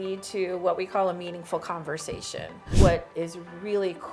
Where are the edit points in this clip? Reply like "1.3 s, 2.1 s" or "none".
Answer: 2.7 s